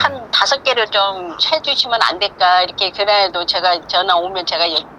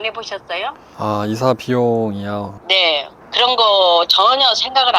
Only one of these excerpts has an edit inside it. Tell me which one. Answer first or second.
second